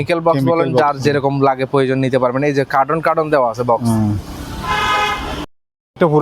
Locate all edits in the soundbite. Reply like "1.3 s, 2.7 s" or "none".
none